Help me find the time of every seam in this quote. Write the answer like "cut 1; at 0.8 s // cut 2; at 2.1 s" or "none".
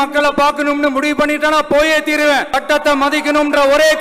cut 1; at 2.5 s